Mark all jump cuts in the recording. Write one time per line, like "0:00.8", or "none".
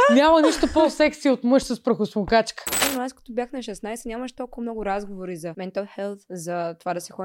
0:02.7
0:05.5
0:06.2